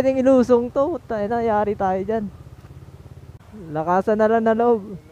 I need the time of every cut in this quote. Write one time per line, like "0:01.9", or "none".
0:03.6